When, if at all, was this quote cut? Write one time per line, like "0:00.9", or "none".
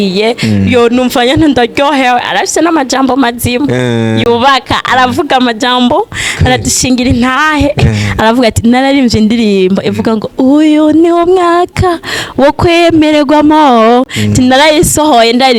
none